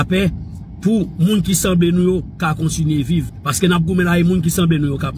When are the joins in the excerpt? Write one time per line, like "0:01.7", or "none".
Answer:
0:03.4